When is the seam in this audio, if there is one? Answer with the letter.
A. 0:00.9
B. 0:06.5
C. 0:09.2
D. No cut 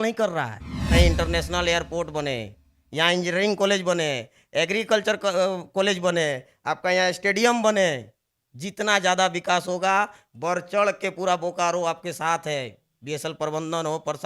A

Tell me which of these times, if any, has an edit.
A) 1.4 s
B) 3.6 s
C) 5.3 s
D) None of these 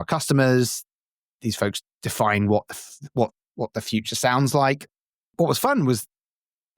C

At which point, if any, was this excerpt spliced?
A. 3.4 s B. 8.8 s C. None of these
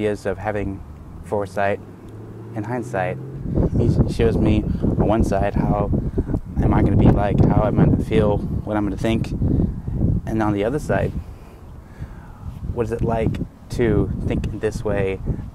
A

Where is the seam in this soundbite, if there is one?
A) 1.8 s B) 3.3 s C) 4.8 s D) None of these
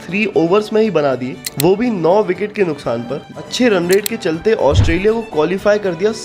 B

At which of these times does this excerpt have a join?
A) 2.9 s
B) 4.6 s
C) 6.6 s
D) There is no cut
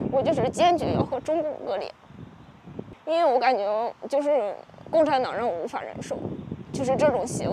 A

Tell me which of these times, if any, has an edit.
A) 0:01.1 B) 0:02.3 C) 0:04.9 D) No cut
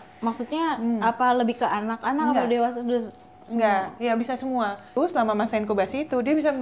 C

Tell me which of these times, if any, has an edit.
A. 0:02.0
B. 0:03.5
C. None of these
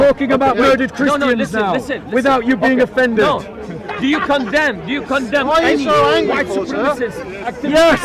C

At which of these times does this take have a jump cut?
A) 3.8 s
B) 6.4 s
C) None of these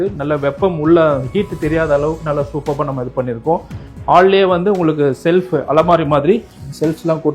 A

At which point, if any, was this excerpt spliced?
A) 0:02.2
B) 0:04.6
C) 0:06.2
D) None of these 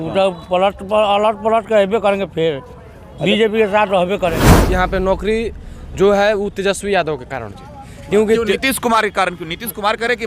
B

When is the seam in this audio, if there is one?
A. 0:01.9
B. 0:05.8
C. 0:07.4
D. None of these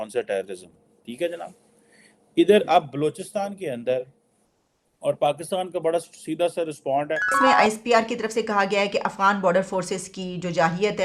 C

